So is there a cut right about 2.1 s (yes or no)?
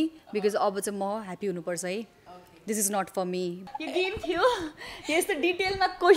no